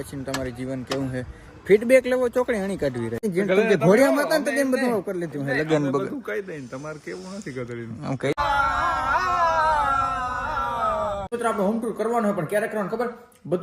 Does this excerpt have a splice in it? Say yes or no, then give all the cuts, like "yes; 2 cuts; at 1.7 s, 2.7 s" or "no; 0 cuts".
yes; 3 cuts; at 3.2 s, 8.4 s, 11.3 s